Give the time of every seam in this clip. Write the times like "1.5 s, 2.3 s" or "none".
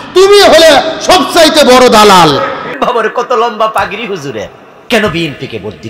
2.7 s